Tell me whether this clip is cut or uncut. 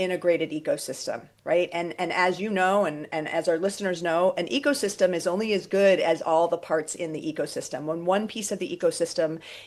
uncut